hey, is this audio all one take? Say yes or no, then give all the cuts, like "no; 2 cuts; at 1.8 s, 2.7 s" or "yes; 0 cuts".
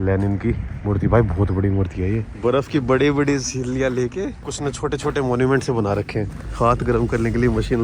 no; 3 cuts; at 2.3 s, 4.4 s, 6.4 s